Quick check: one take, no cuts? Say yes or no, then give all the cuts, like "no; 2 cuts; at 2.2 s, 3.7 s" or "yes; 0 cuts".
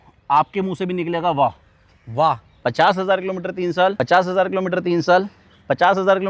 no; 2 cuts; at 2.5 s, 4.0 s